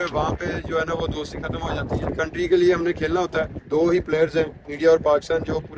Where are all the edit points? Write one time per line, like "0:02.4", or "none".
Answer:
0:02.1
0:03.6